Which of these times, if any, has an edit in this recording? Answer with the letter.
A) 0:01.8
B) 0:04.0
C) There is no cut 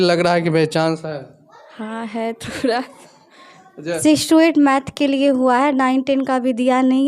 B